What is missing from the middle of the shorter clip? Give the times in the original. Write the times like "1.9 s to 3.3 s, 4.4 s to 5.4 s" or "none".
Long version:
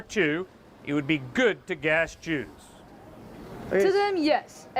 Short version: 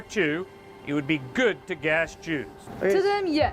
2.6 s to 3.5 s